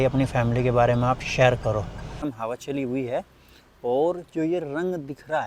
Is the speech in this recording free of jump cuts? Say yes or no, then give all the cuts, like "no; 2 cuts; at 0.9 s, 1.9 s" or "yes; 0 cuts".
no; 1 cut; at 2.3 s